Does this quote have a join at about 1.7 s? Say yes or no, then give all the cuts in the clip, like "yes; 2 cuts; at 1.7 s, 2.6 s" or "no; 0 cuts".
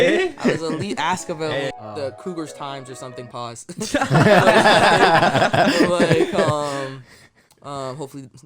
yes; 1 cut; at 1.7 s